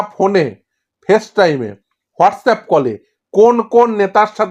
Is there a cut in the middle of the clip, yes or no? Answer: no